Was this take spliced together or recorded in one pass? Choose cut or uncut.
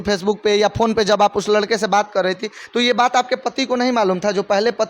uncut